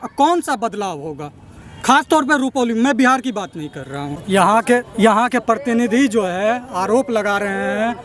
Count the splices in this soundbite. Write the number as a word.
one